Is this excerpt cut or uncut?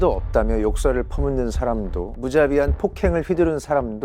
cut